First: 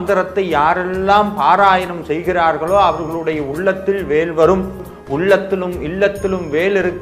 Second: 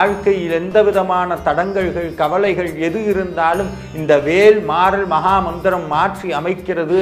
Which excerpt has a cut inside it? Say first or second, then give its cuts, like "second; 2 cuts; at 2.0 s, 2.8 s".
first; 1 cut; at 4.9 s